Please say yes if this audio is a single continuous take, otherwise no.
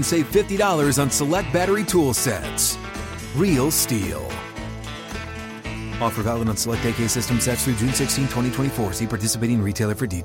yes